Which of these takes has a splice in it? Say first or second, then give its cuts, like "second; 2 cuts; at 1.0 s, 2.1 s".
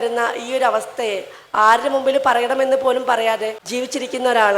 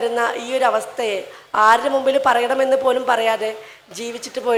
first; 1 cut; at 3.6 s